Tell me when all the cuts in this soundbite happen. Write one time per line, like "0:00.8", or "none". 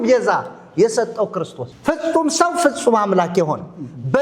0:01.6

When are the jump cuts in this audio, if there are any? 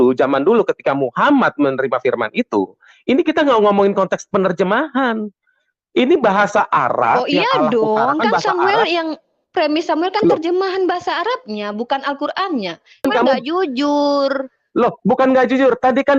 0:13.0

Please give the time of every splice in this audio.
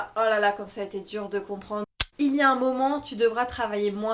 0:01.9

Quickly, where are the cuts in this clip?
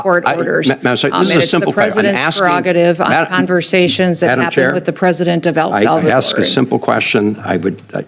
none

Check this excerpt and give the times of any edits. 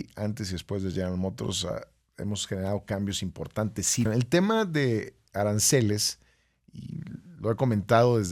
0:04.0

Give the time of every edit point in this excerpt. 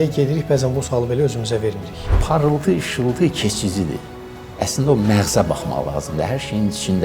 0:02.2

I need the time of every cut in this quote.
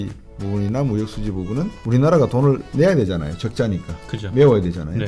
0:01.8

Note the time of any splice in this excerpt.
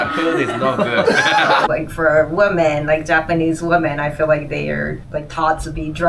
0:01.7

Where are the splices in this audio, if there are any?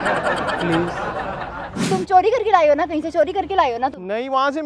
0:01.9

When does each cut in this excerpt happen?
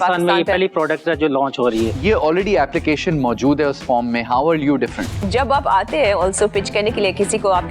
0:02.0
0:05.2

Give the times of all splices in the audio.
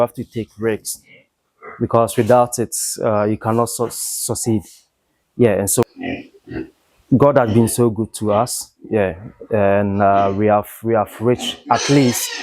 0:05.8

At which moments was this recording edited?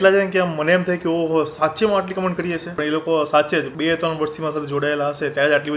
none

